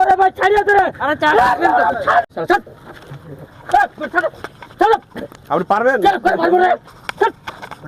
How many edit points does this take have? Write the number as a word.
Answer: one